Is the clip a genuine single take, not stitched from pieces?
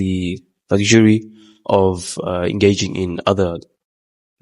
yes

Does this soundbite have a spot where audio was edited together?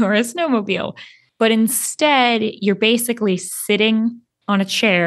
yes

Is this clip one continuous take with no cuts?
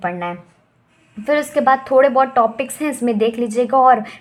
yes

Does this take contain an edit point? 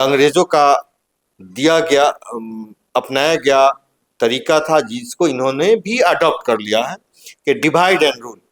no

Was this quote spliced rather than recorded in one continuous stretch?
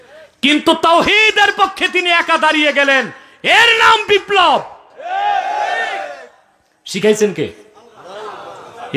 no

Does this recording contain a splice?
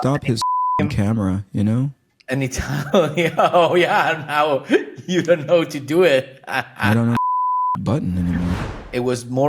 yes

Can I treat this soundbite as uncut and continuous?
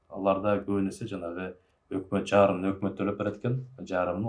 yes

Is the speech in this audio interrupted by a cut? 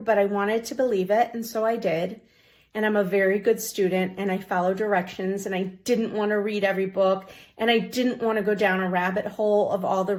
no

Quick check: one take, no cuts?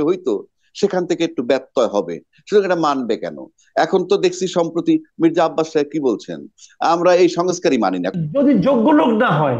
no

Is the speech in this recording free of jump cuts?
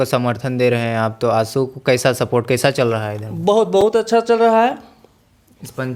yes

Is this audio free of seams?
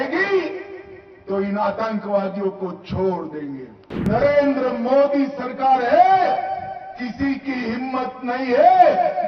no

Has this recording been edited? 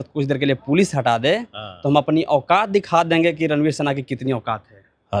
no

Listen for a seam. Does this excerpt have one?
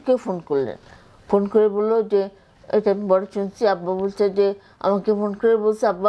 no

